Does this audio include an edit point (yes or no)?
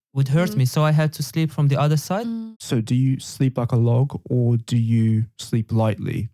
yes